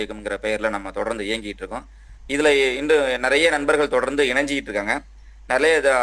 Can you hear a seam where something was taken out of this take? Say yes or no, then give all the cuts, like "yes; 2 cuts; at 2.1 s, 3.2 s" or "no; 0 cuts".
no; 0 cuts